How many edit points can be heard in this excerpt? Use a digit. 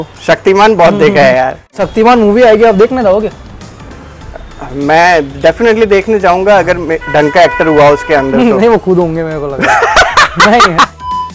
0